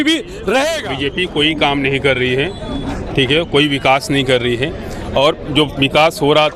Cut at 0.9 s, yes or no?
yes